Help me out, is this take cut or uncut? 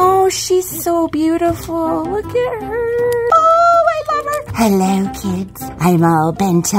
uncut